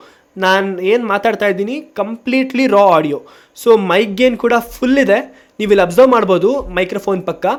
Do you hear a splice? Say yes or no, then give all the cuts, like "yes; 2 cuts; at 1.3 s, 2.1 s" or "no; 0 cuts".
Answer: no; 0 cuts